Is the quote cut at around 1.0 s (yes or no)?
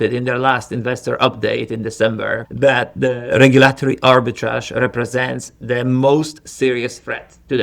no